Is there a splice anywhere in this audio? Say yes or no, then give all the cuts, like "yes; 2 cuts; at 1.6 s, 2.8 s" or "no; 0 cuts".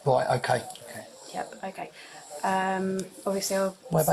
no; 0 cuts